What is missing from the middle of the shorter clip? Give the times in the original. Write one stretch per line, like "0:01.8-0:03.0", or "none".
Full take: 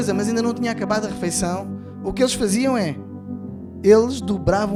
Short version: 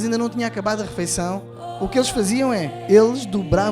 0:03.0-0:03.7